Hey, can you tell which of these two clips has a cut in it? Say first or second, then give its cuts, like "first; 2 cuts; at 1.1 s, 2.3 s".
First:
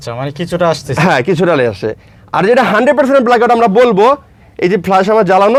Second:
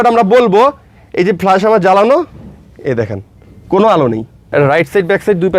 second; 1 cut; at 4.4 s